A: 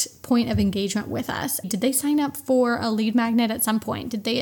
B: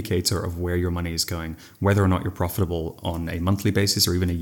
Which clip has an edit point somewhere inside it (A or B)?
A